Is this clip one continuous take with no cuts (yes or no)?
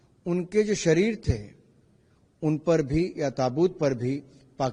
yes